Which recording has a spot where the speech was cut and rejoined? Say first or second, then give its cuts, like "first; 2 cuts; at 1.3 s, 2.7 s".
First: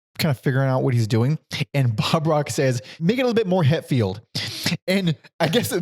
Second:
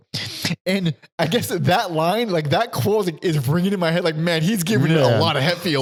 first; 1 cut; at 2.9 s